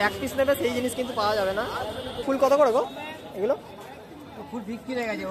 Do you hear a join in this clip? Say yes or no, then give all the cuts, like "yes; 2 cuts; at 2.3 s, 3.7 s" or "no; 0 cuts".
yes; 1 cut; at 2.2 s